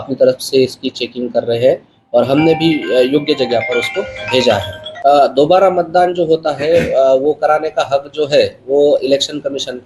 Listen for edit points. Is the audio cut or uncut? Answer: cut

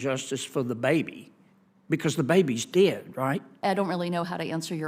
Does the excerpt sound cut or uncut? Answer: cut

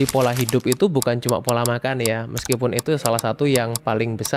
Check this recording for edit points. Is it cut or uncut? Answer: uncut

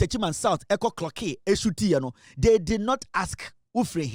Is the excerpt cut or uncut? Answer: uncut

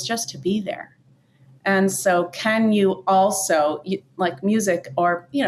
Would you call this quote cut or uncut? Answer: uncut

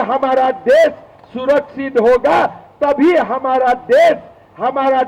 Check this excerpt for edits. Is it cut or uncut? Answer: uncut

